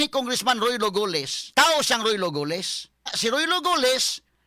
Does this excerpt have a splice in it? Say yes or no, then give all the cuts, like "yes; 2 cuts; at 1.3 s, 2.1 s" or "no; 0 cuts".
yes; 2 cuts; at 1.4 s, 3.1 s